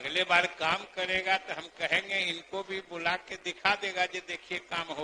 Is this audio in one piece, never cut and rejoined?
yes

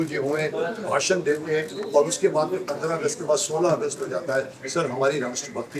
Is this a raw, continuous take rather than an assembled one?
yes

